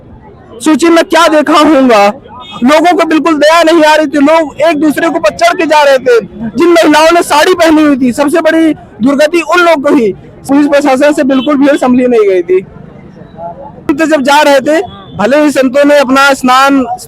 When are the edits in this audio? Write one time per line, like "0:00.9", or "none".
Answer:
0:10.5
0:13.9